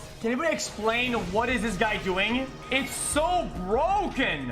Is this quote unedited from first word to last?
no; 1 cut; at 2.6 s

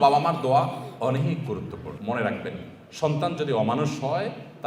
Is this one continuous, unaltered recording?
no; 1 cut; at 2.0 s

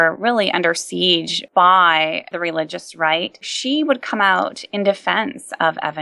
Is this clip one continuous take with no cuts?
no; 1 cut; at 3.5 s

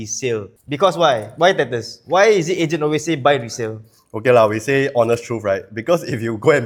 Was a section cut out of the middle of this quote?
no; 0 cuts

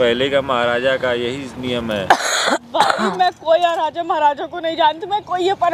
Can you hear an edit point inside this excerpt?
no; 0 cuts

